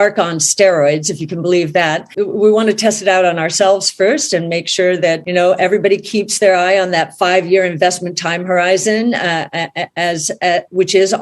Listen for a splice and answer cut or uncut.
cut